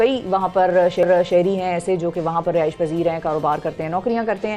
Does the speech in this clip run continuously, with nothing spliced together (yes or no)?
yes